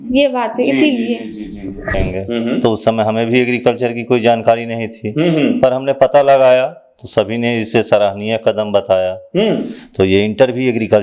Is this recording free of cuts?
no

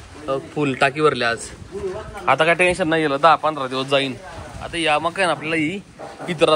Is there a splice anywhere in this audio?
no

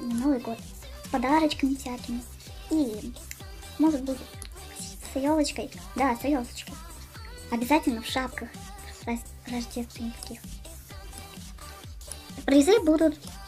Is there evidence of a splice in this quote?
yes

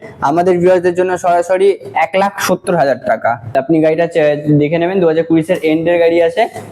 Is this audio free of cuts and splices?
no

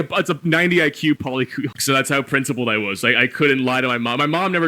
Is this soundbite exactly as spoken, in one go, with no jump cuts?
no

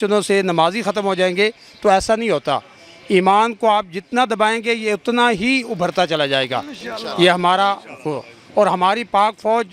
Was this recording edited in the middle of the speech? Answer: no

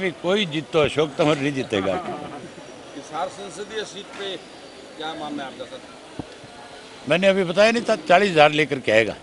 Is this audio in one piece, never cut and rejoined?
yes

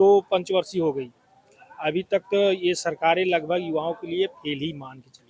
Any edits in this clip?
no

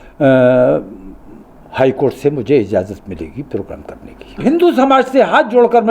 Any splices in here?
yes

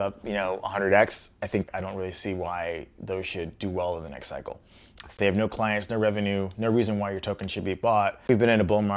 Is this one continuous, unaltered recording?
no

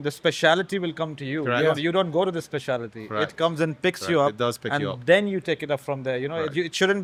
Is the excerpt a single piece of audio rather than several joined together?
yes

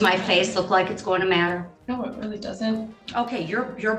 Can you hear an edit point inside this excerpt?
yes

